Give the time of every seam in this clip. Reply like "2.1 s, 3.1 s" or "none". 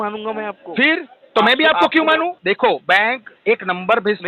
2.3 s